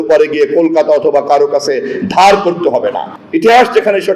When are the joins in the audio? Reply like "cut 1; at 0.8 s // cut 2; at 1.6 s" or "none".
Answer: cut 1; at 3.1 s

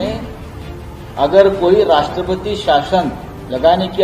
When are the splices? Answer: none

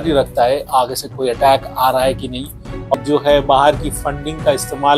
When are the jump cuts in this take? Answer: cut 1; at 2.9 s

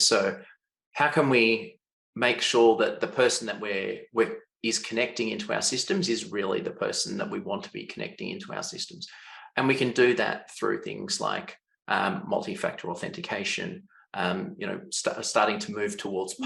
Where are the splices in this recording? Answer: none

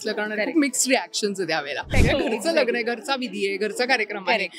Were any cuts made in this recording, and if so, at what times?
cut 1; at 1.9 s

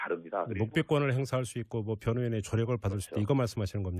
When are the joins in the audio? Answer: none

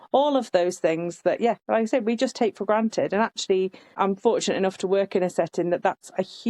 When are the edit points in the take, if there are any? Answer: none

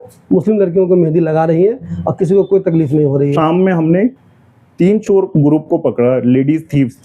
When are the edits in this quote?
cut 1; at 3.3 s

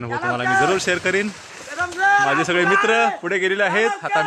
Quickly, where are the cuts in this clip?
none

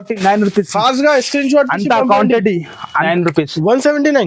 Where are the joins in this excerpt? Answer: cut 1; at 3.0 s

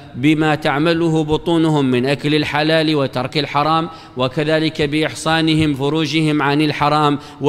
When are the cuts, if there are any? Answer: cut 1; at 1.0 s // cut 2; at 2.7 s // cut 3; at 4.1 s

